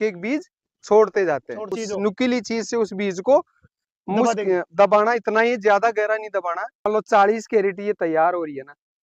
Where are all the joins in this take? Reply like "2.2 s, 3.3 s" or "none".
1.8 s, 6.9 s